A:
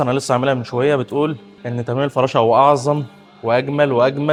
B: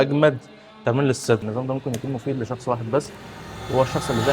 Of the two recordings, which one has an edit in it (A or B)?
B